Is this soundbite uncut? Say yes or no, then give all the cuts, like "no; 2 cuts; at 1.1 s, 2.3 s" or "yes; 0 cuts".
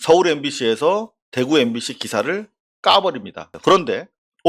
no; 1 cut; at 3.4 s